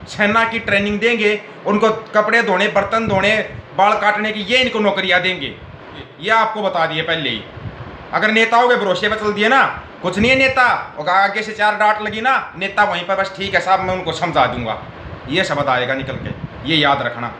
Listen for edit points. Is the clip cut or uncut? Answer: cut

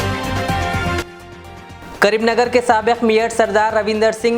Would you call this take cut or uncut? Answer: cut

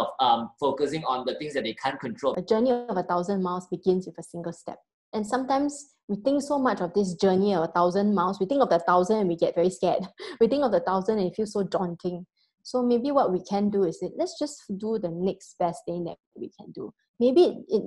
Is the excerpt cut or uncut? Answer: cut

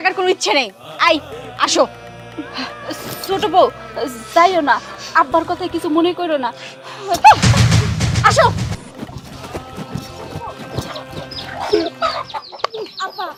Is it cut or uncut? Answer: uncut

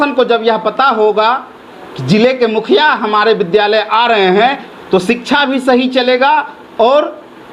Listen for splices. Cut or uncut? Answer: uncut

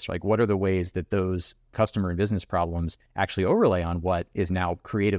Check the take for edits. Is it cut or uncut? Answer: uncut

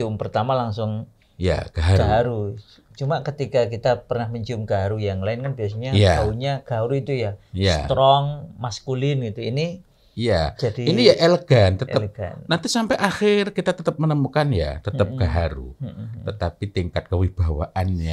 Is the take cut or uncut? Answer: uncut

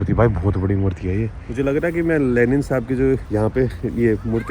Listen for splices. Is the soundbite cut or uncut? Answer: uncut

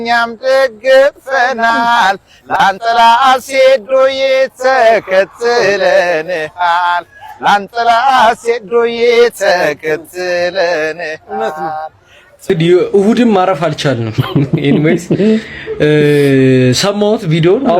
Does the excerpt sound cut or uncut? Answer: cut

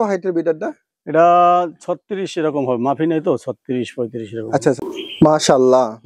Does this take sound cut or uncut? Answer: cut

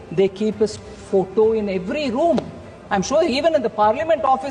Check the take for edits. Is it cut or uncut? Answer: uncut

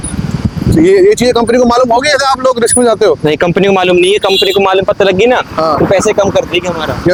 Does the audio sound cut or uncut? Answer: uncut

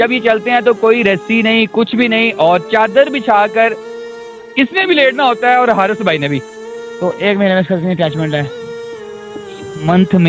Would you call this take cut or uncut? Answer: cut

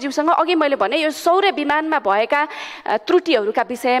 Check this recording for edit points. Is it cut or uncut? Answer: uncut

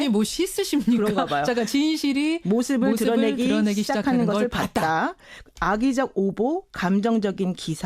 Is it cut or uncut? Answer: cut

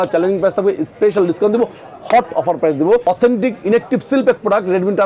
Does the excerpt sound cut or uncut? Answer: cut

